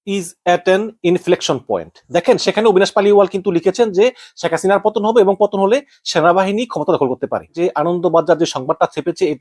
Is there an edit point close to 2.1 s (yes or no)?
no